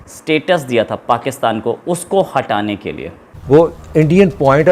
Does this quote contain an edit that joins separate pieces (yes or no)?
yes